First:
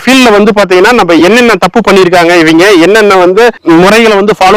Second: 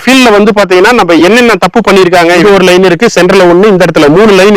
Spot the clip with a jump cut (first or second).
second